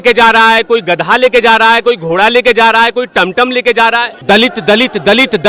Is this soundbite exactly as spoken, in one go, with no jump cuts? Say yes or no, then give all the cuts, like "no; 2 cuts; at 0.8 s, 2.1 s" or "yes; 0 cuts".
no; 1 cut; at 4.1 s